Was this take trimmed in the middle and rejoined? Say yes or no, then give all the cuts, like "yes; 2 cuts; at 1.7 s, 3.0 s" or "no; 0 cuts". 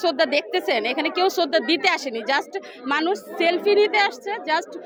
no; 0 cuts